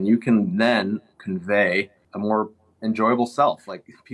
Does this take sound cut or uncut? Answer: cut